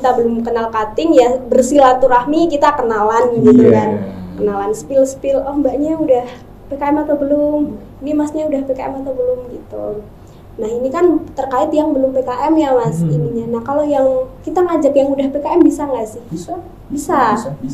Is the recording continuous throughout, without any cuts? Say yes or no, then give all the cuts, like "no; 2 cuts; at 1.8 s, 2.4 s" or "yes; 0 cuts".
yes; 0 cuts